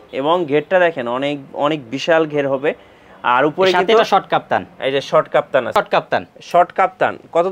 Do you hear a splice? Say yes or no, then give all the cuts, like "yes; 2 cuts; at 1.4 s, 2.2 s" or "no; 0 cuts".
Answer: yes; 1 cut; at 5.7 s